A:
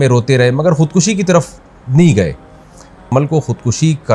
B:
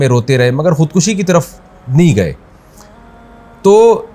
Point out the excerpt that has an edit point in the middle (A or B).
A